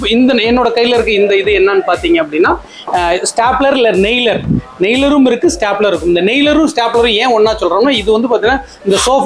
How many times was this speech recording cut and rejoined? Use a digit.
0